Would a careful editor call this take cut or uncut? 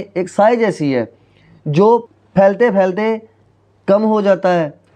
cut